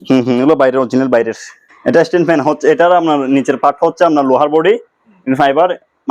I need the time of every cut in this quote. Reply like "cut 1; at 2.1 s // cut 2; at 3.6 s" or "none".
cut 1; at 2.1 s